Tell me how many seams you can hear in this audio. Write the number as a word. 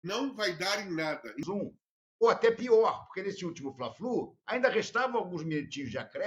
one